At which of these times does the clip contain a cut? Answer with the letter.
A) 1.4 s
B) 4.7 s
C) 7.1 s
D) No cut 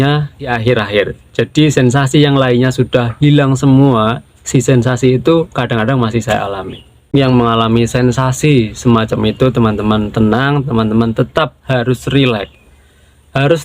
C